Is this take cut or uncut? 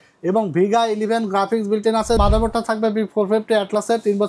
cut